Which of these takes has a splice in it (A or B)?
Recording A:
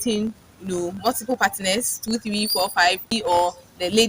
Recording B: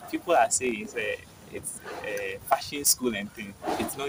A